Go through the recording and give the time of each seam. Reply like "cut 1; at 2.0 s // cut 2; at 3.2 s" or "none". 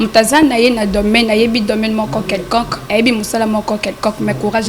none